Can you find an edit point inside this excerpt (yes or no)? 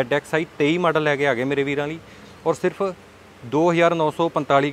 no